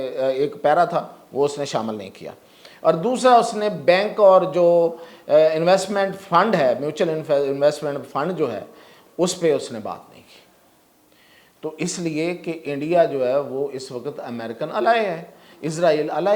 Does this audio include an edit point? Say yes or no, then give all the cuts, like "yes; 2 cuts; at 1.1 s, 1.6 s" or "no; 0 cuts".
no; 0 cuts